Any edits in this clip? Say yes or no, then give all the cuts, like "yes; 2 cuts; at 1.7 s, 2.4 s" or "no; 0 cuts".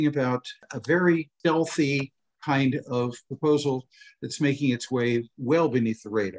yes; 1 cut; at 1.3 s